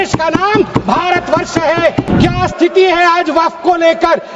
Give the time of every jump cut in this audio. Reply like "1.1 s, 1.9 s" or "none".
2.1 s